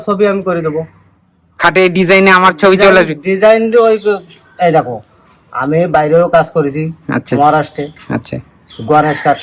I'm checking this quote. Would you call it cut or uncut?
uncut